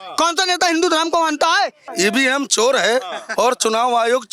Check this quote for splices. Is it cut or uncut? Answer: cut